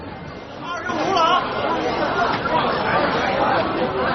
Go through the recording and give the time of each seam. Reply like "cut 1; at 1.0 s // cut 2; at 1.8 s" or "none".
none

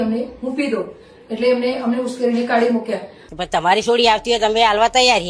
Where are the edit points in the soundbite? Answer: cut 1; at 3.2 s

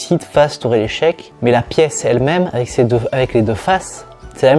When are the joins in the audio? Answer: cut 1; at 1.3 s

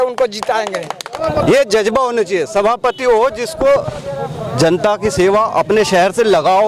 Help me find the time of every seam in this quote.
cut 1; at 1.1 s

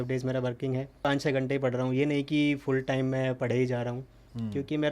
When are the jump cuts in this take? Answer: cut 1; at 1.0 s

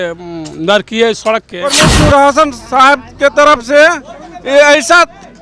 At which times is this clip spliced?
cut 1; at 1.6 s

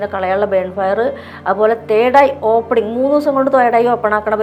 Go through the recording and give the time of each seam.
none

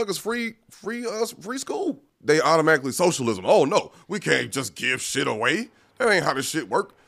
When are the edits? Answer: cut 1; at 2.1 s

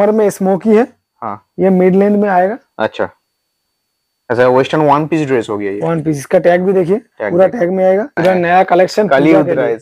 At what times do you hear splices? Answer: cut 1; at 8.1 s

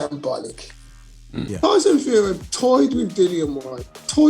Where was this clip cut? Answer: cut 1; at 1.5 s

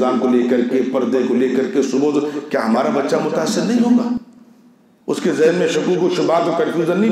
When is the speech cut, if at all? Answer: none

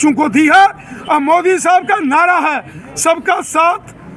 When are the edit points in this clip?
none

